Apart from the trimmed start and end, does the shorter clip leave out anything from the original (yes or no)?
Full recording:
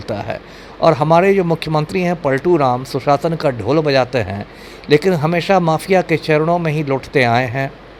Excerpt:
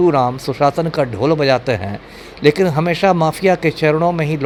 no